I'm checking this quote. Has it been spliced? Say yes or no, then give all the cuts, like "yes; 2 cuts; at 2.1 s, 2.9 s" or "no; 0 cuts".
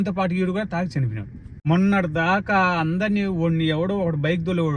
yes; 1 cut; at 1.6 s